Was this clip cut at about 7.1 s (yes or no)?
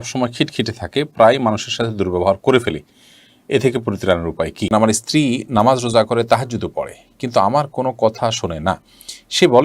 no